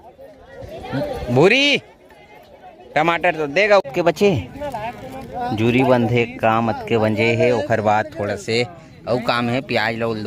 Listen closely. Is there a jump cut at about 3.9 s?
yes; 1 cut; at 3.9 s

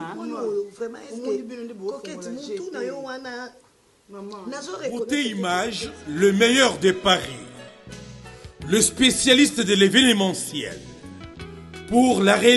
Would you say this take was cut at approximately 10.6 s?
no; 1 cut; at 5.1 s

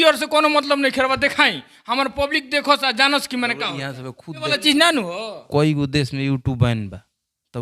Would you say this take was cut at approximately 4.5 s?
yes; 1 cut; at 4.5 s

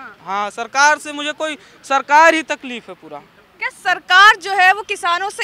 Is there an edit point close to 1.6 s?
no; 0 cuts

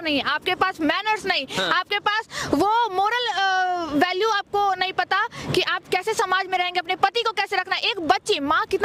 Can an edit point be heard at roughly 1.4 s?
no; 0 cuts

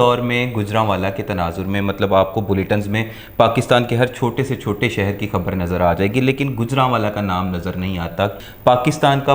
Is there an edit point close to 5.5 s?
no; 1 cut; at 8.4 s

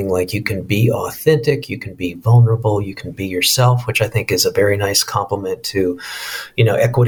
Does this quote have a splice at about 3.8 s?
no; 0 cuts

